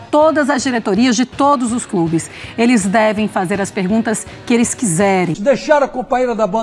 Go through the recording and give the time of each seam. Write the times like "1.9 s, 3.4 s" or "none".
5.4 s

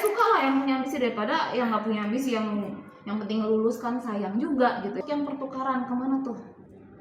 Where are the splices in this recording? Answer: 5.0 s

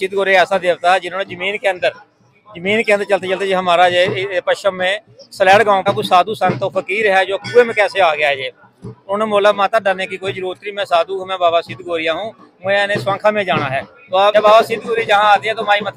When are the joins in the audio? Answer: 5.8 s, 14.3 s

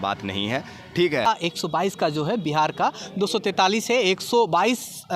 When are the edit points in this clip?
1.3 s

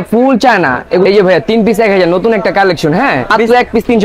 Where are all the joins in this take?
1.0 s, 3.3 s

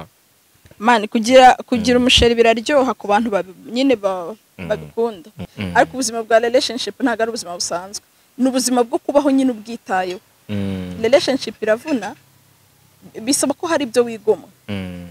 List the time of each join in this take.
5.6 s

